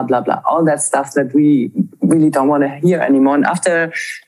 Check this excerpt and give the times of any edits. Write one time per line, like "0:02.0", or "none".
none